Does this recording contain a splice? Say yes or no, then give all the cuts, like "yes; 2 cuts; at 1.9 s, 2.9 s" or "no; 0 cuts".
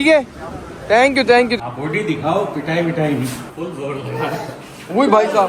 yes; 1 cut; at 1.5 s